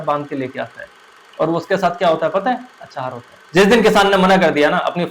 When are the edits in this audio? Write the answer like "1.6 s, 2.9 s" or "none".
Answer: 3.3 s

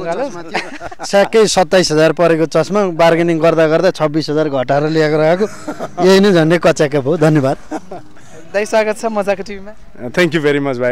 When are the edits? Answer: none

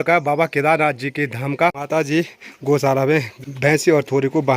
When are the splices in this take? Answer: 1.8 s, 3.4 s

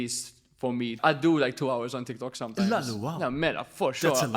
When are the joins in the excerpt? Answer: 1.0 s

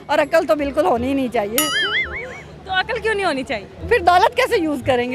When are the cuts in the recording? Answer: 3.7 s

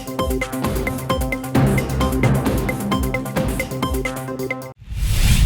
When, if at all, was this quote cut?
4.5 s

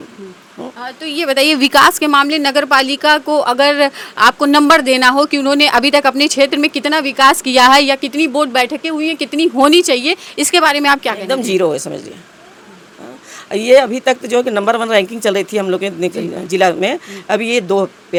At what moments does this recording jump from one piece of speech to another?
none

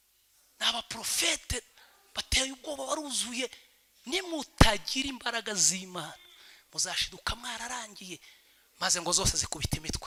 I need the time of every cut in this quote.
none

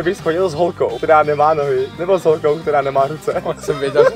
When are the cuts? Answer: none

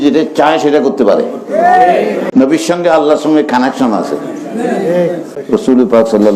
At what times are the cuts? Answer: 2.2 s, 5.3 s

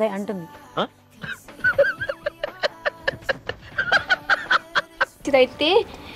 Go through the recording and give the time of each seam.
5.2 s

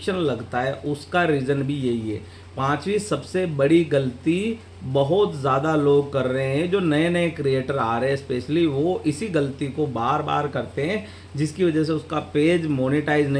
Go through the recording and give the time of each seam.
none

